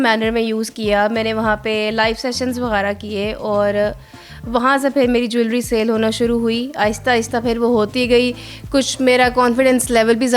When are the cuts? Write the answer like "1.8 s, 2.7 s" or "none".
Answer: none